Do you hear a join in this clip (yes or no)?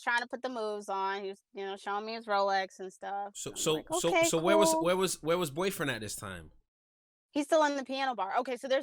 no